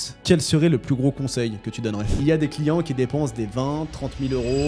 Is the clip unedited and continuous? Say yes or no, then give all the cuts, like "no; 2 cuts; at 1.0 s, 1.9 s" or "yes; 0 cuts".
no; 1 cut; at 2.2 s